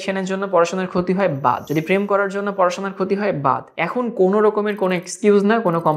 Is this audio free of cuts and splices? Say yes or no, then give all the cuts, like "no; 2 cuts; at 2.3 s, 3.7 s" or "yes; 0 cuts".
no; 2 cuts; at 1.6 s, 3.7 s